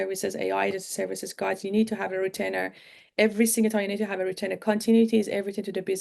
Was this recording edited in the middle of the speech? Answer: no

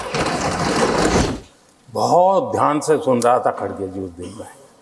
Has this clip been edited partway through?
yes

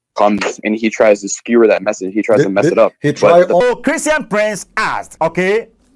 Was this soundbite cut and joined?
yes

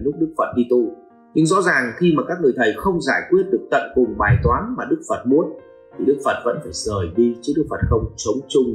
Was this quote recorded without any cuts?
yes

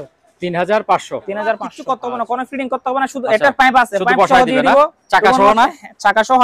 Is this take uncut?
no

